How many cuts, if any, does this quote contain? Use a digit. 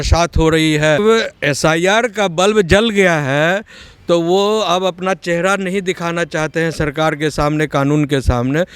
1